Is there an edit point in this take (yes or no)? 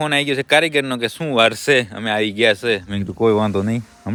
no